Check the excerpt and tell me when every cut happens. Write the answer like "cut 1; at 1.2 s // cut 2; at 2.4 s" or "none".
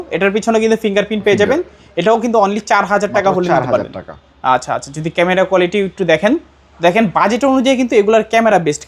none